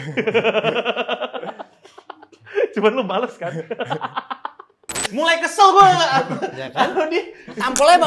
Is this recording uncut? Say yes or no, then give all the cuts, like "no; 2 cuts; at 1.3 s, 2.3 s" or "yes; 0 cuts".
no; 1 cut; at 5.0 s